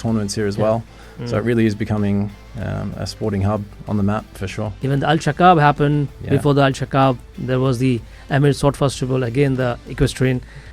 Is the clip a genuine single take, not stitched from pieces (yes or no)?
yes